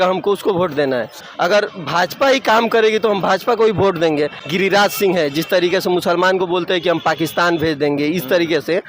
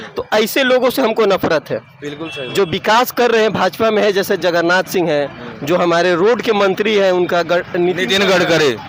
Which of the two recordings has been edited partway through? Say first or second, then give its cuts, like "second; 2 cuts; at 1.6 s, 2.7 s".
first; 2 cuts; at 1.2 s, 4.4 s